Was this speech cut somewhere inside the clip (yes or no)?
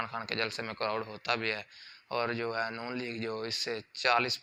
no